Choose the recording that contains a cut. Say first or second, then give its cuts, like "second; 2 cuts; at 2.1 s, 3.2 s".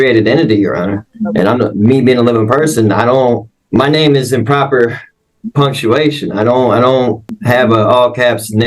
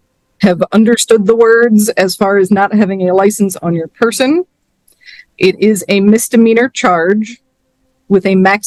first; 3 cuts; at 1.1 s, 3.5 s, 7.4 s